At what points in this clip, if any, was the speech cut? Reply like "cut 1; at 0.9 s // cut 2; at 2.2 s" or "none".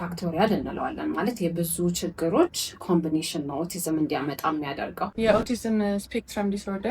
cut 1; at 5.0 s